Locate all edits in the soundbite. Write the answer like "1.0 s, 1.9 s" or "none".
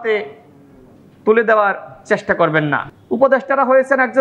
2.9 s